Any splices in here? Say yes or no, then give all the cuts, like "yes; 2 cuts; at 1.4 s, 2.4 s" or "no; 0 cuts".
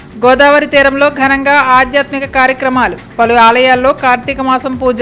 no; 0 cuts